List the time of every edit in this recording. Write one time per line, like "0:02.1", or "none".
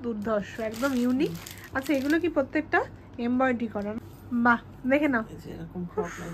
0:03.9